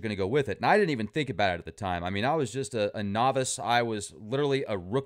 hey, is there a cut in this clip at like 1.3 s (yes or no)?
yes